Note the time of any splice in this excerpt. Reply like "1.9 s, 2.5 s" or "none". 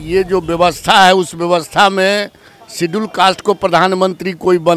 none

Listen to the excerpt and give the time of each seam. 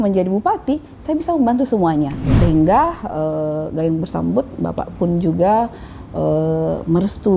2.3 s

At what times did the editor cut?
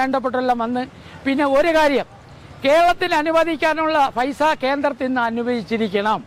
none

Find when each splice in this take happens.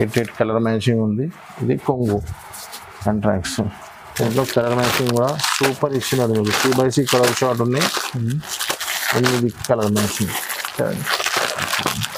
none

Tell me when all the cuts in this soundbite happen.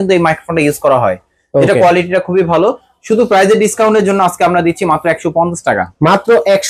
none

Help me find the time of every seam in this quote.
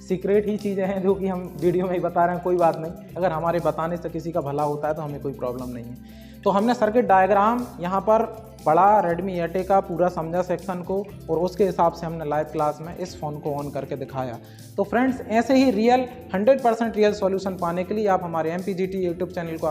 none

